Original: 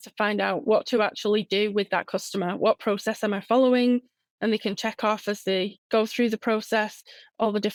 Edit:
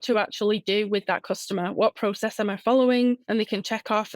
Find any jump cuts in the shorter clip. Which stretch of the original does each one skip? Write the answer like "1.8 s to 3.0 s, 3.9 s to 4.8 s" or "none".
4.1 s to 4.4 s

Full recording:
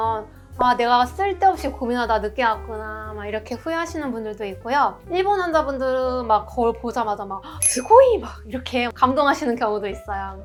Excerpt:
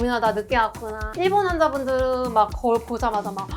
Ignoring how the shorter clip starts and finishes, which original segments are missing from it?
2.9 s to 5.0 s

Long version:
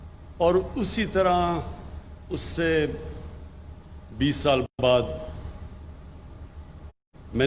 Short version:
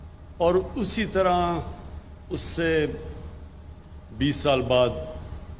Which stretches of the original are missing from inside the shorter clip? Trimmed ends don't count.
4.7 s to 4.8 s

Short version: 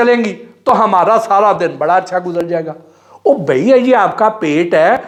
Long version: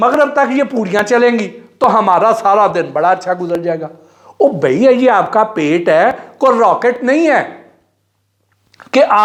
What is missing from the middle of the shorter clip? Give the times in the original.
none

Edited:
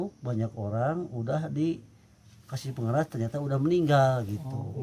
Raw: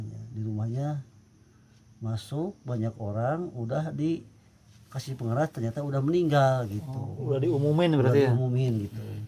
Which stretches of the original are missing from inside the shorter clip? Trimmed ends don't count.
none

